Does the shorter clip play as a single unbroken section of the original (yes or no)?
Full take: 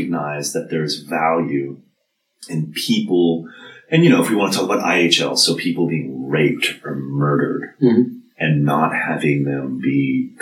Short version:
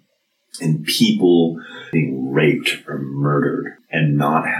no